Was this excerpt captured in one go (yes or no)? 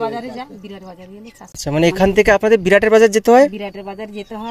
no